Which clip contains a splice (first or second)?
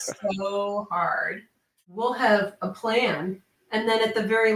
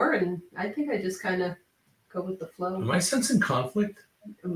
first